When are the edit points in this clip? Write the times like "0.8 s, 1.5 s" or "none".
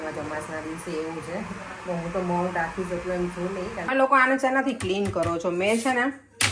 3.9 s